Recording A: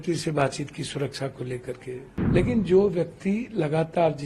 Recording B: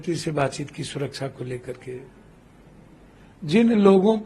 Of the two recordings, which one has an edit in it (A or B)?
A